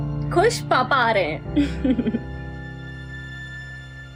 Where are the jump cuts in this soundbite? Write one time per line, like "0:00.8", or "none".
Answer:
none